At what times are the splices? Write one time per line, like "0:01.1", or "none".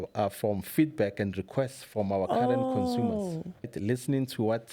0:03.7